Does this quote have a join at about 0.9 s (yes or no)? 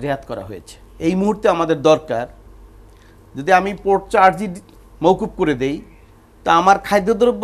yes